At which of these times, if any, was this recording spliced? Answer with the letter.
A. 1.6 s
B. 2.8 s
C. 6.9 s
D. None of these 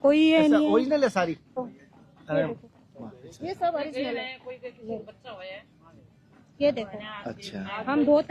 A